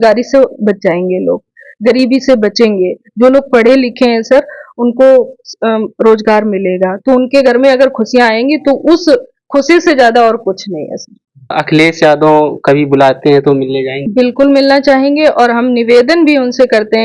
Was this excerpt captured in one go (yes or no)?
no